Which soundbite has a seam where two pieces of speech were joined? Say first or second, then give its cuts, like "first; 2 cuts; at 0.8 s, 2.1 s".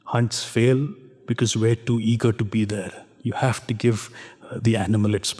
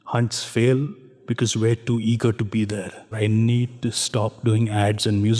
second; 1 cut; at 3.2 s